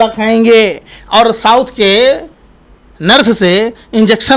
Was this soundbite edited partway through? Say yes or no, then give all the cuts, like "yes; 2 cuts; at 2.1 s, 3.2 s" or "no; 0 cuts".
no; 0 cuts